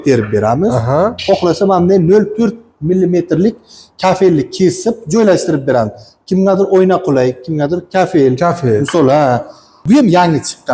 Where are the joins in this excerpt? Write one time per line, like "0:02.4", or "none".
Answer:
0:09.8